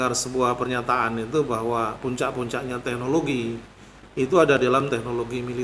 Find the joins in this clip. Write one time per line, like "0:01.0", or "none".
none